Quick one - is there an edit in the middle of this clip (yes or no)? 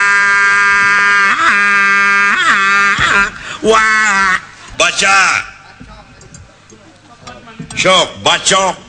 yes